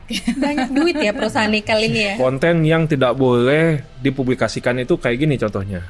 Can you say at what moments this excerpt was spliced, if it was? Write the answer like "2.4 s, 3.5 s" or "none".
2.1 s